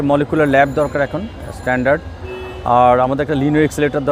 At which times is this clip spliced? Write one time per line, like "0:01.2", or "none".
none